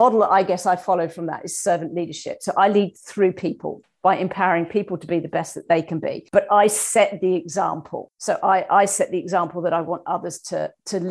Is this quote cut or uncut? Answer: uncut